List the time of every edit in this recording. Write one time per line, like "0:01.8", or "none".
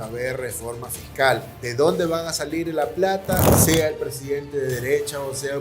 0:01.6
0:03.5